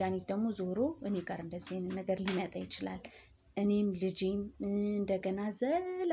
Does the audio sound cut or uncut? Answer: uncut